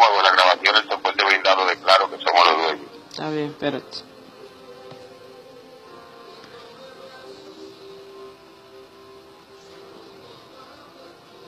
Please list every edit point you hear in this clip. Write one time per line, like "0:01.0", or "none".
0:01.2